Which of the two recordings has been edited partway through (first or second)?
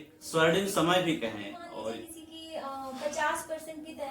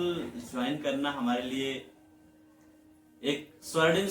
first